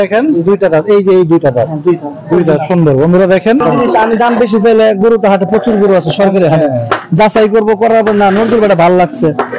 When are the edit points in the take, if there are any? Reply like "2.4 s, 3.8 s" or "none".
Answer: 3.6 s